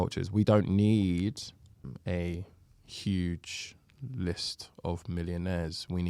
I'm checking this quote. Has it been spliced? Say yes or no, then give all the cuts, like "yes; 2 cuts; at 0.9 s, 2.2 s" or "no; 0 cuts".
yes; 1 cut; at 1.9 s